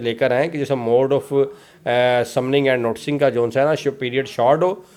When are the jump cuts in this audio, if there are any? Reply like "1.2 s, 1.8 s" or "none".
none